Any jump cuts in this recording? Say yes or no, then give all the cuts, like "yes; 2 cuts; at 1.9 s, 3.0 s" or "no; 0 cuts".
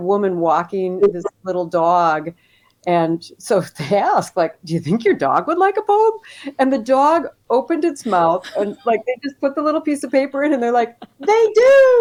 no; 0 cuts